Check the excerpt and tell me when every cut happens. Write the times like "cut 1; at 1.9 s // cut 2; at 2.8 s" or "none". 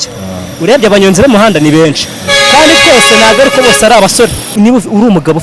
cut 1; at 4.5 s